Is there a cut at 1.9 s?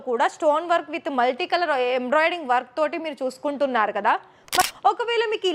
no; 1 cut; at 4.6 s

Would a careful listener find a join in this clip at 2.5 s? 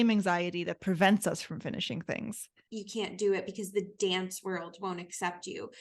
yes; 1 cut; at 2.5 s

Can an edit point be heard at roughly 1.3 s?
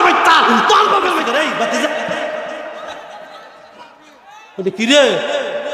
yes; 1 cut; at 1.3 s

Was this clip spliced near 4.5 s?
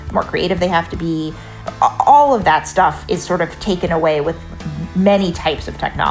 no; 1 cut; at 1.5 s

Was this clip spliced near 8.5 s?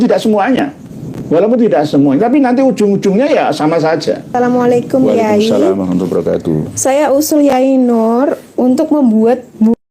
no; 1 cut; at 4.3 s

